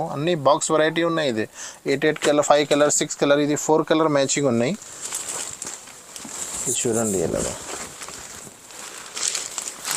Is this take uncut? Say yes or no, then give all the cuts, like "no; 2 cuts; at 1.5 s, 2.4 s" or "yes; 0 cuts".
yes; 0 cuts